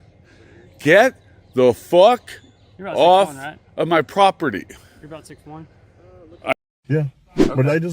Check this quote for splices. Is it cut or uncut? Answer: cut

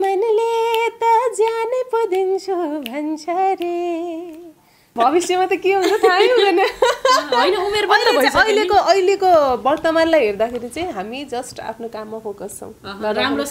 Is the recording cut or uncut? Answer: cut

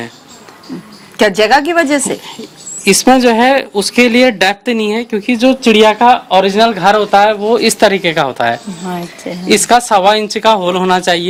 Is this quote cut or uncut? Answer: uncut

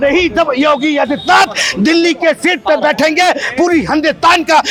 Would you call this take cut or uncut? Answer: uncut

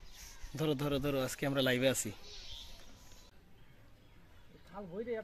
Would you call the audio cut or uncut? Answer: cut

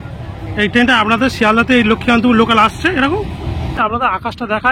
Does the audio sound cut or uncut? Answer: cut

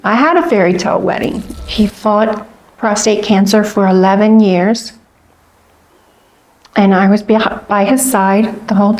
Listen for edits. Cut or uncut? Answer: cut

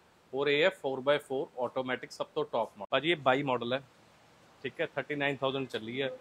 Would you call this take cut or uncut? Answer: cut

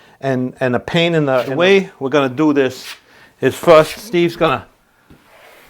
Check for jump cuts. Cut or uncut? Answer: cut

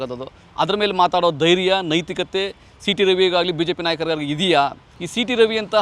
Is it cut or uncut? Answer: cut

